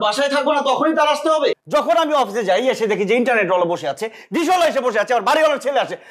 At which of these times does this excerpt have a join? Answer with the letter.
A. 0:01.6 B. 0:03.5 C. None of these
A